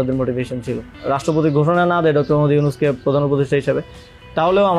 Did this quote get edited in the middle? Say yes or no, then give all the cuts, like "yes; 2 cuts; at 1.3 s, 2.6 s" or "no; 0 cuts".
yes; 1 cut; at 0.9 s